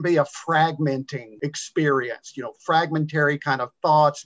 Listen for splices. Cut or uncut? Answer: cut